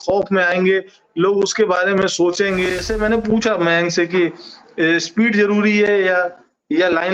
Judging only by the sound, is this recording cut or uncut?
cut